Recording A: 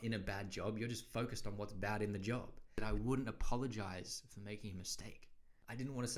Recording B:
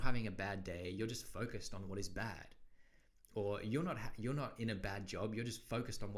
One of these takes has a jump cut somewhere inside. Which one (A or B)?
A